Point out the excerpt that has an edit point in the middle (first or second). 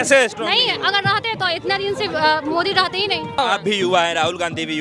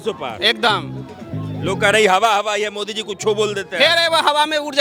first